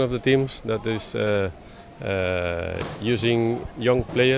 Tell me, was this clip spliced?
no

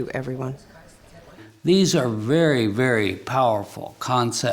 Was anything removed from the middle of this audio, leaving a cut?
yes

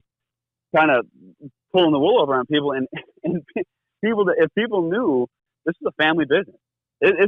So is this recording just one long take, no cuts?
no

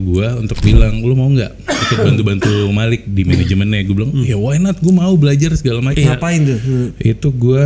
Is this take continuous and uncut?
no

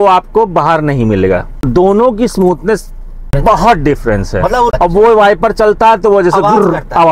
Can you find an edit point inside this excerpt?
yes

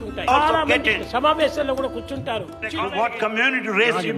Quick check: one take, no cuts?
no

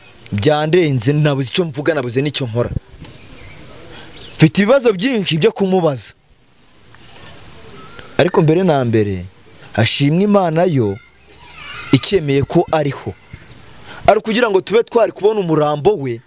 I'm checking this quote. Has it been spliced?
no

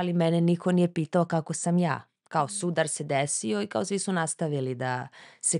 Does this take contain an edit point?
no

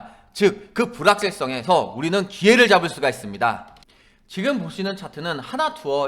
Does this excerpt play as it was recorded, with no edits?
yes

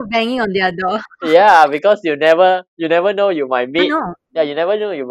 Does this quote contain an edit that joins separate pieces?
no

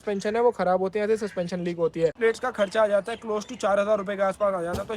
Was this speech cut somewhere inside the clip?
yes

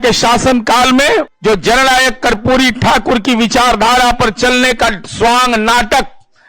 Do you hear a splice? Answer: yes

